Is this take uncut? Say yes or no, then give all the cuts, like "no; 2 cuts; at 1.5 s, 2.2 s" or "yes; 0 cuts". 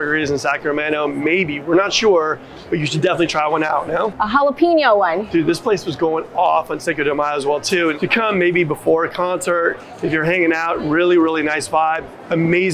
no; 3 cuts; at 4.2 s, 5.2 s, 8.0 s